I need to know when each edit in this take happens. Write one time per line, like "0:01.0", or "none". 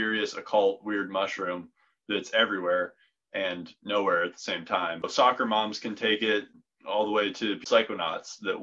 0:05.1
0:06.5
0:07.6